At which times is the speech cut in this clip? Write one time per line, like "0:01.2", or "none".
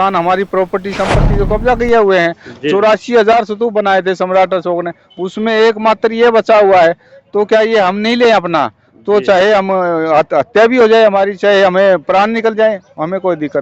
none